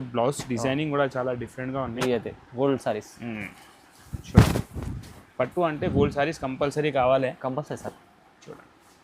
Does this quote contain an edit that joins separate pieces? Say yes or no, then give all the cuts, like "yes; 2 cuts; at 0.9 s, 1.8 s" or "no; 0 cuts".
yes; 1 cut; at 1.9 s